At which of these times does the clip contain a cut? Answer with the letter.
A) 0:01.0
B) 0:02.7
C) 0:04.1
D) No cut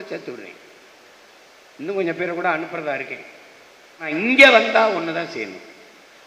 C